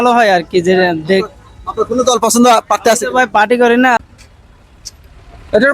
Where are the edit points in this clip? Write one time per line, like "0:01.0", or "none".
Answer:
0:04.0